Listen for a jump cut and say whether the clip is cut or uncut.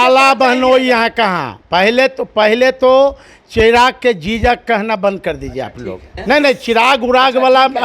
cut